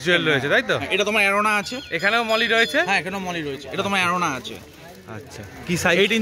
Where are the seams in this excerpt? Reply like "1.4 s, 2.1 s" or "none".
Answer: none